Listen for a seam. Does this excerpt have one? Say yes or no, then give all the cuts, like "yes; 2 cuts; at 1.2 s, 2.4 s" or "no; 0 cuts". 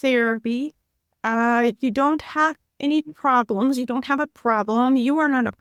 no; 0 cuts